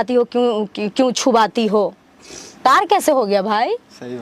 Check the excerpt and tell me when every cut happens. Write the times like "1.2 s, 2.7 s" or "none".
2.5 s